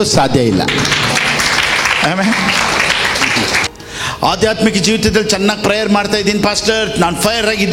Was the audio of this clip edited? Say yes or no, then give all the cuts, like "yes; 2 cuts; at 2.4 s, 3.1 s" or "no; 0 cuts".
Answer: yes; 1 cut; at 3.7 s